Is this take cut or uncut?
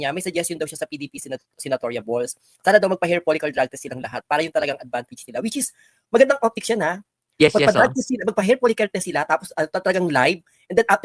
uncut